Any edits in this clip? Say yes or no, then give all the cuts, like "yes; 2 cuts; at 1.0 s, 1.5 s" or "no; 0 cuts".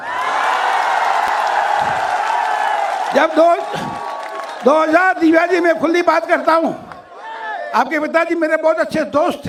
no; 0 cuts